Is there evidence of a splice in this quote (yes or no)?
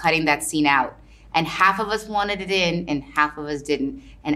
no